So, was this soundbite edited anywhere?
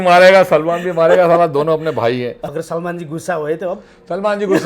yes; 1 cut; at 2.4 s

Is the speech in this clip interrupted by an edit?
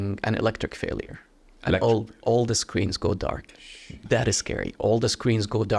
no; 0 cuts

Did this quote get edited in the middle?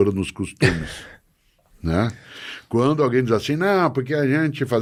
no; 0 cuts

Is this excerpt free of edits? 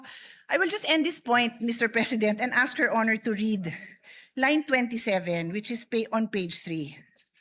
yes; 0 cuts

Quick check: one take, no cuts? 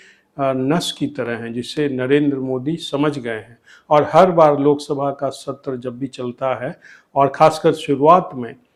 yes; 0 cuts

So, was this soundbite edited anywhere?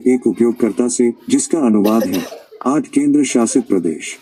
no; 0 cuts

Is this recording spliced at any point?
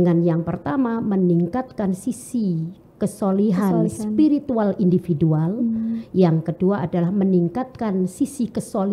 no; 0 cuts

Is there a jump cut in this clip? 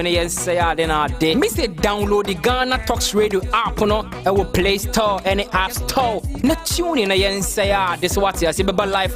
no; 0 cuts

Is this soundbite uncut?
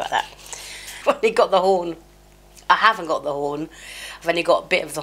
no; 1 cut; at 1.0 s

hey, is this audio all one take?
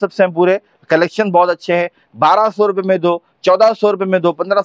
yes; 0 cuts

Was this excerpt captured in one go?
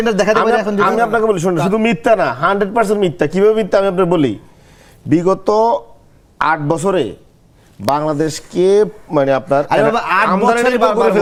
yes; 0 cuts

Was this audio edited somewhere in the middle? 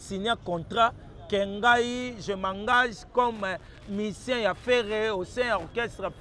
no; 0 cuts

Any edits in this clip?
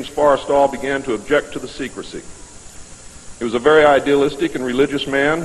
yes; 1 cut; at 4.5 s

